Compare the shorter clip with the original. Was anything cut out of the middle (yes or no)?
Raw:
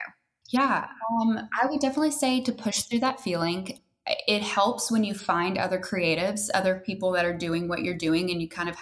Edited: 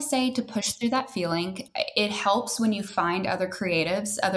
yes